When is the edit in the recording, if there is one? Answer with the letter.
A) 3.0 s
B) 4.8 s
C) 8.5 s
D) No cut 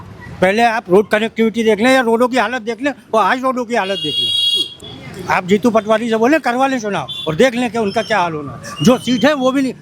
B